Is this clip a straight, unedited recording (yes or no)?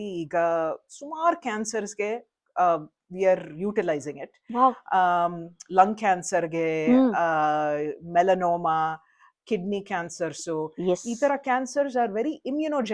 yes